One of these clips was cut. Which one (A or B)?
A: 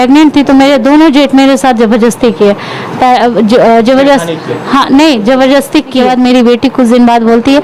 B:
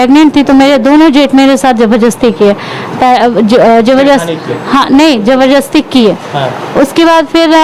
A